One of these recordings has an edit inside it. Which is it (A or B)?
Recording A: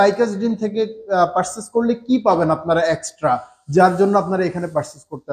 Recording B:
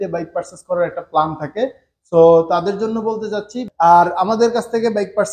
B